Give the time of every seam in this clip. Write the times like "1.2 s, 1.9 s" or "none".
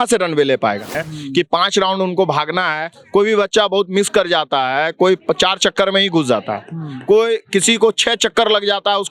0.9 s